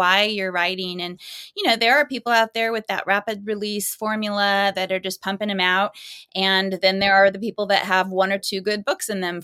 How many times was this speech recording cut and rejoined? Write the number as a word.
one